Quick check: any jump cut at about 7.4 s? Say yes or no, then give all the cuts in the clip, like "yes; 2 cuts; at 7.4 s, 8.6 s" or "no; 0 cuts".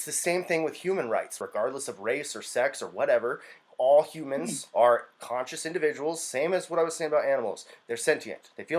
no; 1 cut; at 1.4 s